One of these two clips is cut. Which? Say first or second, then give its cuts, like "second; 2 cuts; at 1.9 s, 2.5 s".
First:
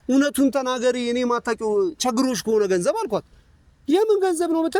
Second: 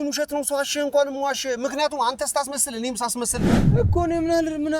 second; 1 cut; at 3.6 s